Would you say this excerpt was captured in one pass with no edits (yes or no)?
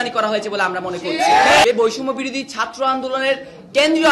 no